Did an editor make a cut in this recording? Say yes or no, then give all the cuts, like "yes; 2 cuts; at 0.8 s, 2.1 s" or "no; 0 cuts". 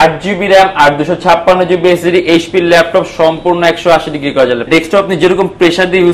yes; 1 cut; at 4.7 s